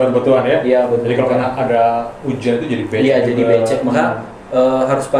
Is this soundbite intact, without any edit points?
yes; 0 cuts

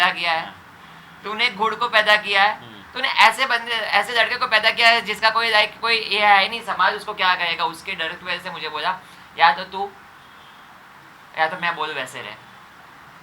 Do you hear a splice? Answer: no; 0 cuts

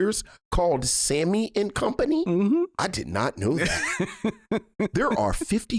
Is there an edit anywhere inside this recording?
yes; 2 cuts; at 2.7 s, 4.9 s

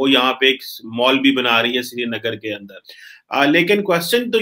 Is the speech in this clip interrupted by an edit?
no; 0 cuts

